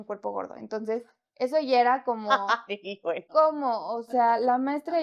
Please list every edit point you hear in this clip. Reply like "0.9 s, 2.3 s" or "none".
none